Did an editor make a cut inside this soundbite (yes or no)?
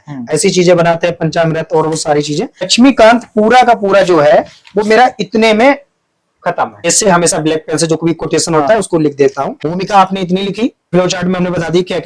yes